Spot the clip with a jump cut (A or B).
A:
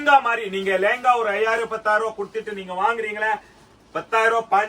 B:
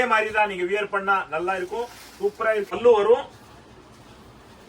B